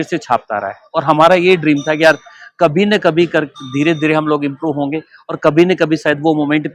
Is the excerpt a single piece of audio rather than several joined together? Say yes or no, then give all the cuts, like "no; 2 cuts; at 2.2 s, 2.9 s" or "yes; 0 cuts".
yes; 0 cuts